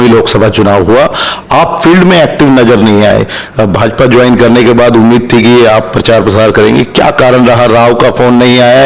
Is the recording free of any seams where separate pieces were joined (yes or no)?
yes